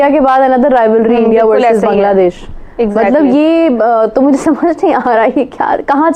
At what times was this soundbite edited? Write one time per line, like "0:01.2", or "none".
none